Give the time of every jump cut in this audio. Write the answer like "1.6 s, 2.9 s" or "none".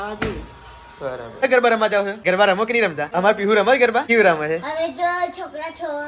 1.4 s, 2.1 s, 3.0 s, 4.0 s